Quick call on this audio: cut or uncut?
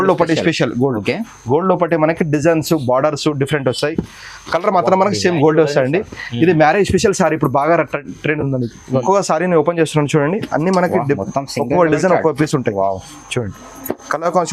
cut